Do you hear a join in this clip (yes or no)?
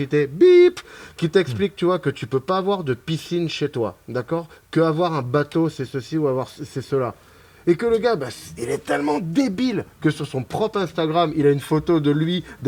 no